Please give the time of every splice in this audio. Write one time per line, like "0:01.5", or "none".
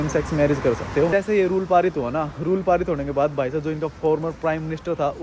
0:01.1